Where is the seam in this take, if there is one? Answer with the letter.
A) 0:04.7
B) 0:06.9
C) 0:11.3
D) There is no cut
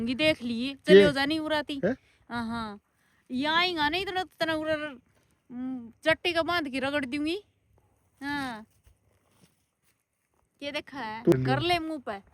C